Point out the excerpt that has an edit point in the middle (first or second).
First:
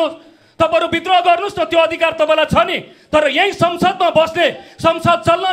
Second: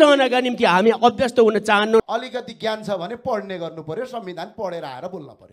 second